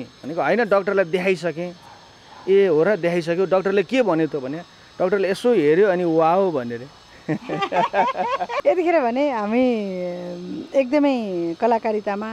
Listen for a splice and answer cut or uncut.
uncut